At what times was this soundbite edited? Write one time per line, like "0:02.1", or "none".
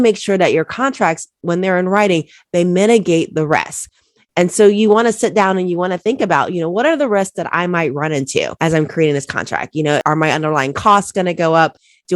0:08.5
0:10.0